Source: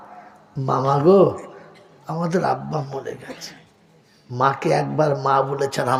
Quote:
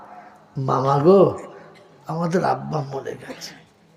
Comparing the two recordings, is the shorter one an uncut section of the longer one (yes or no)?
yes